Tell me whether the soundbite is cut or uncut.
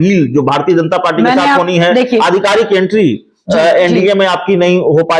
uncut